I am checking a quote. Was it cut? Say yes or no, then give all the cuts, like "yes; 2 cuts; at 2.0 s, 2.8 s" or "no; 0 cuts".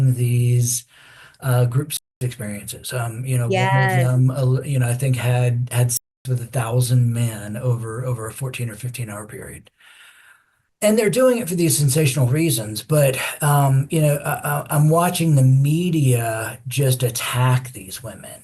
no; 0 cuts